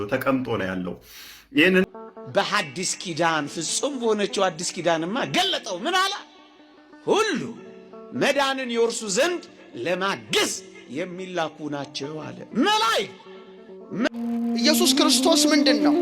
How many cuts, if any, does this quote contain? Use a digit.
2